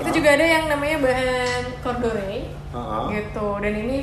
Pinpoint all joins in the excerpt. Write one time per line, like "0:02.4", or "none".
none